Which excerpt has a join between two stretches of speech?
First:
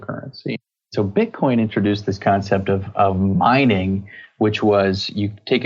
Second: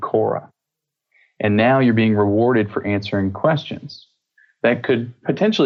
first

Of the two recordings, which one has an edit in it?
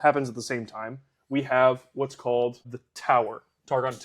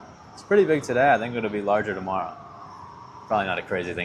first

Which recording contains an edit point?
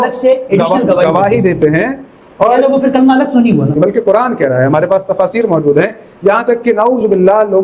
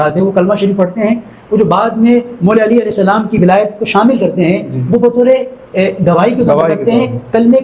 first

